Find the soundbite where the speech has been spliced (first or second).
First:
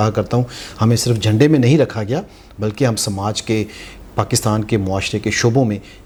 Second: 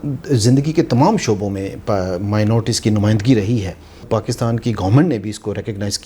second